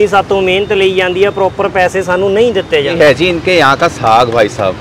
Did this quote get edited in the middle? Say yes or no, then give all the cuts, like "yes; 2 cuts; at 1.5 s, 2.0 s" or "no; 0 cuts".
yes; 1 cut; at 2.9 s